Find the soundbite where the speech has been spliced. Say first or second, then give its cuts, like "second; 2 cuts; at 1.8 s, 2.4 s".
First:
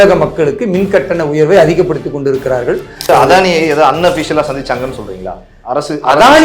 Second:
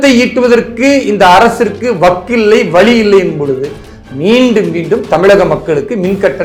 first; 1 cut; at 3.0 s